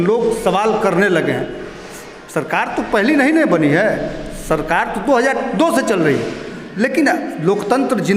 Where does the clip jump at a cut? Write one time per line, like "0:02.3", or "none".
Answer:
none